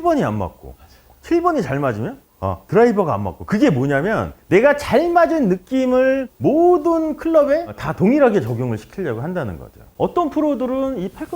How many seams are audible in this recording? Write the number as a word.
one